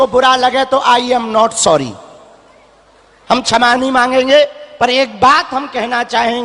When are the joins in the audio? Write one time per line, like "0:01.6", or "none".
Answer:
none